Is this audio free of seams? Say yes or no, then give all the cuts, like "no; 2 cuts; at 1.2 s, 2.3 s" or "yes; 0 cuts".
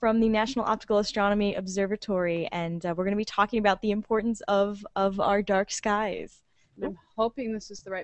yes; 0 cuts